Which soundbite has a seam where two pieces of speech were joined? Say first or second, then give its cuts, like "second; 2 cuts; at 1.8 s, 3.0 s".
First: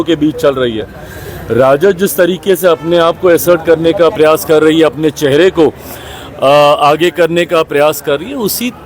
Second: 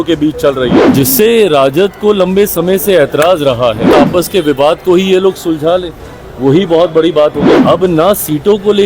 second; 3 cuts; at 0.8 s, 3.9 s, 7.5 s